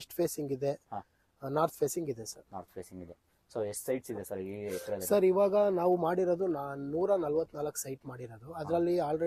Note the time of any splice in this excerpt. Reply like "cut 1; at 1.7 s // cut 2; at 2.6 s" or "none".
none